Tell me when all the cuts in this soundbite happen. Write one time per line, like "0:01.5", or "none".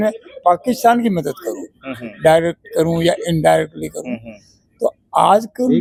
none